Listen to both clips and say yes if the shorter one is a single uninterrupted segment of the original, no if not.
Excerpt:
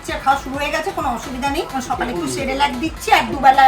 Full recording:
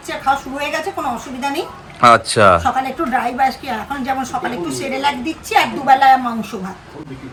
no